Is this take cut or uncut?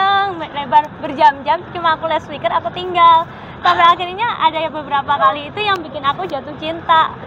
uncut